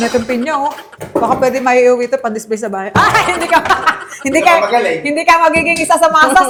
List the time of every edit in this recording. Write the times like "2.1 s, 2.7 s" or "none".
none

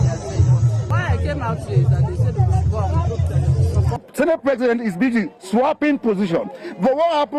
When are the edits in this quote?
0.9 s, 4.1 s

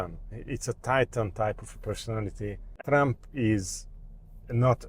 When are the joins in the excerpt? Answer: 2.8 s

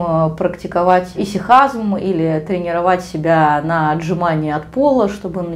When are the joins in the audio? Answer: 1.1 s

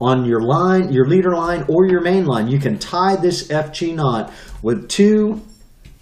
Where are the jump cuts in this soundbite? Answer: none

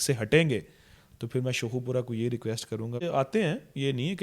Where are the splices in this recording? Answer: 3.0 s

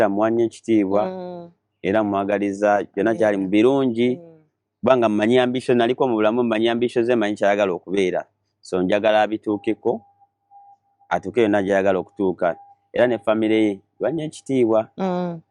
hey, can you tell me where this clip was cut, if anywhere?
none

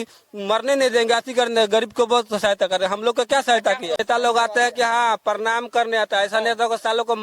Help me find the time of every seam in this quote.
4.0 s

